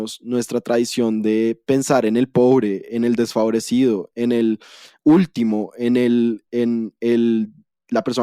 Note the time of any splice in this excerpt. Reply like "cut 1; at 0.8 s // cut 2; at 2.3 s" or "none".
none

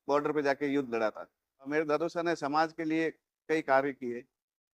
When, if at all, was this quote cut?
cut 1; at 1.7 s

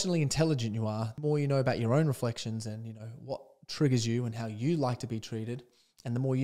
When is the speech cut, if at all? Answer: cut 1; at 1.1 s

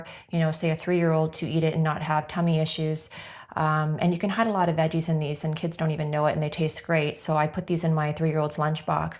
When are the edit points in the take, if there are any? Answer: none

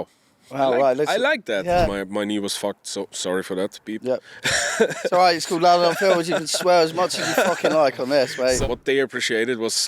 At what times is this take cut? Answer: cut 1; at 1.8 s // cut 2; at 8.6 s

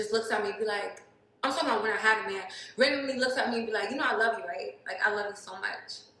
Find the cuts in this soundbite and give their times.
cut 1; at 4.4 s

